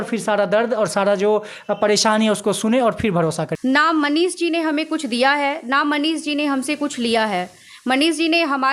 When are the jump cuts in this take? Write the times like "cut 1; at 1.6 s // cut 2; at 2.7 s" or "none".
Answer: cut 1; at 3.5 s